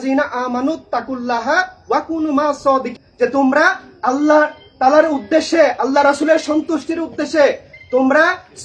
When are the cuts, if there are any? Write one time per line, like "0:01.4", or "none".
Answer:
0:03.0

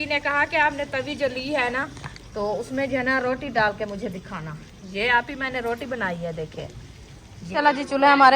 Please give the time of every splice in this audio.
0:07.3

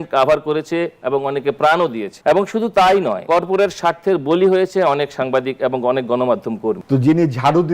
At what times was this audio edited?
0:02.1
0:03.2
0:06.8

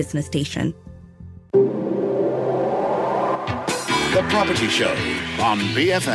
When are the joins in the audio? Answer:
0:01.1

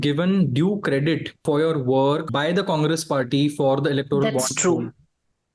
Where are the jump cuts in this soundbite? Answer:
0:01.4
0:02.3

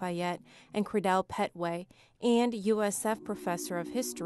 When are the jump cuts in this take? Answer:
0:03.0

